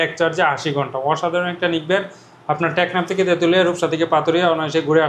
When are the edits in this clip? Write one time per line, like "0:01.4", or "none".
none